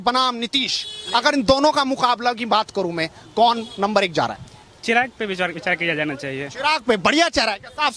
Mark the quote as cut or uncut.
uncut